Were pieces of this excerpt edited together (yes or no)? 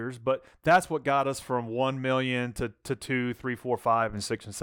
no